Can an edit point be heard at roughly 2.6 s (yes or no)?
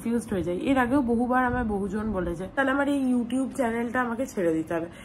yes